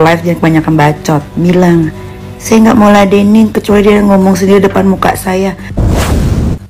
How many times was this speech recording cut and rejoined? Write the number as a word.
one